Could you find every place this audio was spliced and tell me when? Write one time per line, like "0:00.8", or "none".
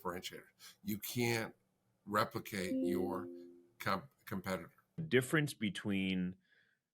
0:05.0